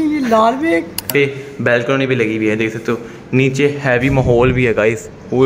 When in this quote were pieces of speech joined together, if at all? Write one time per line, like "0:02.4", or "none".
0:01.1